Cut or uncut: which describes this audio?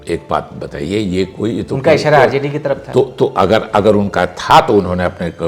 uncut